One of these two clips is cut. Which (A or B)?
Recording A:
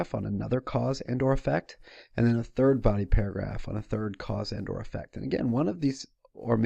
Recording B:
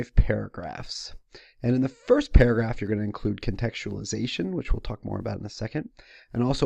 B